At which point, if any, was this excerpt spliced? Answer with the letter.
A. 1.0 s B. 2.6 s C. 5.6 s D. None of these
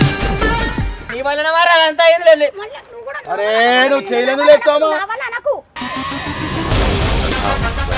A